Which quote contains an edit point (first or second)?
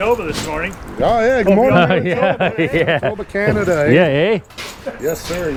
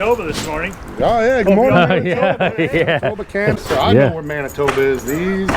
second